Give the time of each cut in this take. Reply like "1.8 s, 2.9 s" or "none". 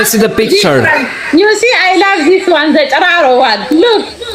none